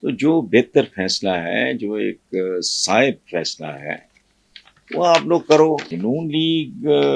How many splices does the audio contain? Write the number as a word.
one